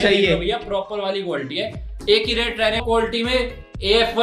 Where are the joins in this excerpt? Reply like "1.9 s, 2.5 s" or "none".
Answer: 2.8 s